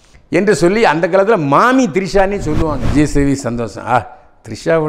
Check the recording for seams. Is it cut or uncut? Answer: cut